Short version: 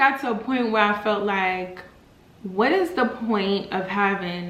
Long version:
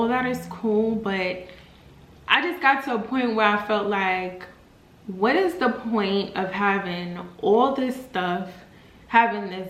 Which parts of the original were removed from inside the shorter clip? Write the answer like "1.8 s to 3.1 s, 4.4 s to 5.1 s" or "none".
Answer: none